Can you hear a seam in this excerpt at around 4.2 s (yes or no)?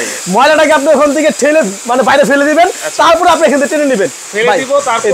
yes